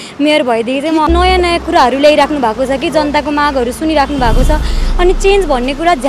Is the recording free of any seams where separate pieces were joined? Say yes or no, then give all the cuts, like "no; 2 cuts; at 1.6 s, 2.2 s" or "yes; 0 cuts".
no; 1 cut; at 1.1 s